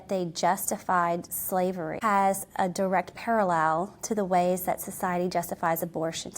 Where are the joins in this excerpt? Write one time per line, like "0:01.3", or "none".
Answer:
0:02.0